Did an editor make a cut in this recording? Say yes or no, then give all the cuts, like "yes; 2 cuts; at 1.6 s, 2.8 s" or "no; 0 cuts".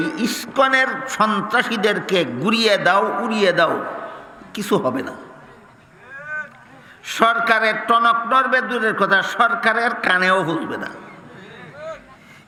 no; 0 cuts